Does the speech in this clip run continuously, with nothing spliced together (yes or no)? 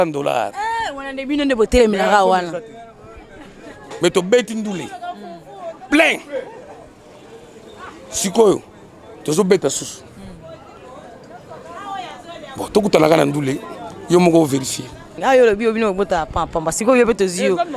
no